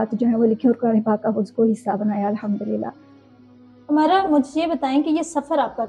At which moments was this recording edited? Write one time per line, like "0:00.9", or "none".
none